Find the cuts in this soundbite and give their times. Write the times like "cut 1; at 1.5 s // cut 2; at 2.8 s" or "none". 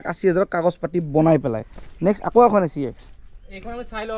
none